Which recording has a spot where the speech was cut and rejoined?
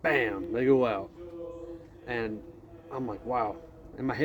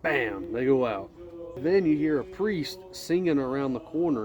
second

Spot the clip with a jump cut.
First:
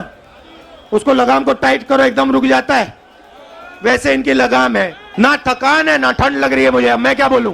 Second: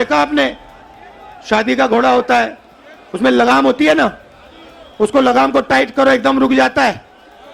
first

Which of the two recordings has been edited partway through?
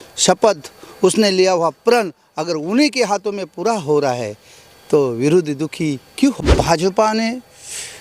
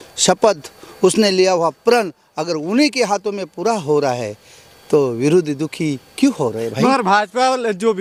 first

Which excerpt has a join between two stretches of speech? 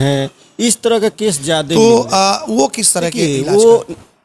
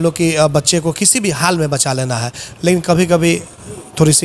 first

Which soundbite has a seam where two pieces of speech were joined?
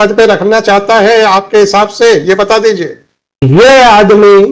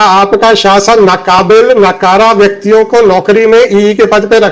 first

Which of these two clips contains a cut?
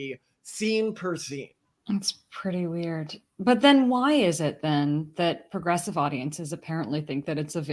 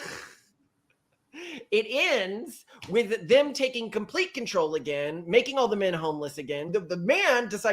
second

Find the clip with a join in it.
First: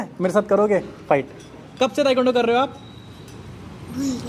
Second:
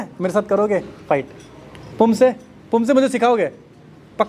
first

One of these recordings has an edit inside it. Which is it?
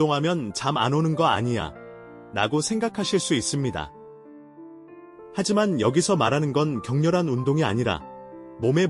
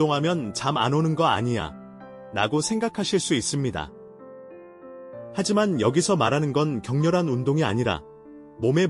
second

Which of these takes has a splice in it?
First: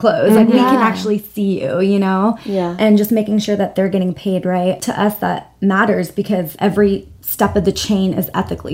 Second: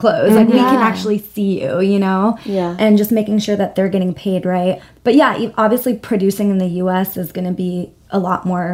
first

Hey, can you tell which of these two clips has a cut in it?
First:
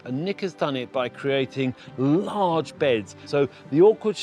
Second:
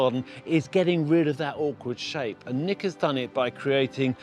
first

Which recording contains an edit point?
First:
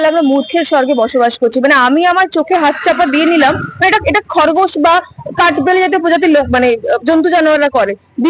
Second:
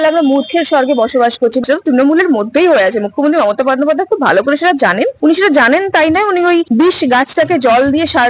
second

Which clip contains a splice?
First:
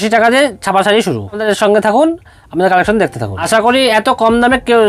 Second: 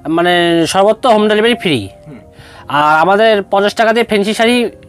first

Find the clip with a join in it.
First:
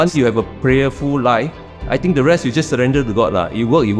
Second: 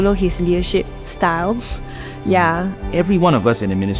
second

